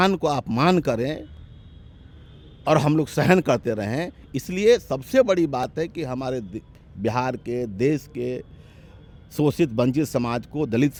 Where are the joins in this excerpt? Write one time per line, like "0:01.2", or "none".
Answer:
none

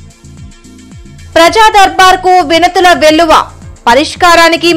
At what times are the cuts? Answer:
0:01.1

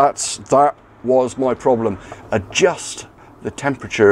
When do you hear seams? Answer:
0:02.1

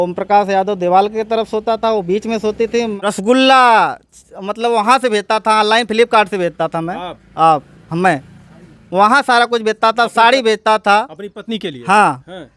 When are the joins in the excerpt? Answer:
0:03.0

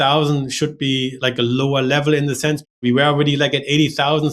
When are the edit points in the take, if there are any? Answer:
0:01.1
0:02.7

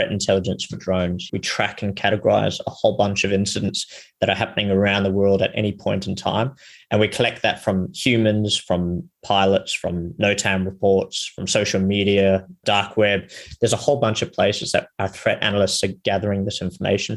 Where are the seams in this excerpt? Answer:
0:01.3

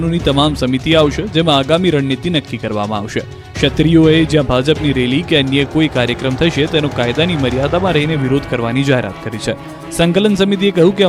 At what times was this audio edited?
none

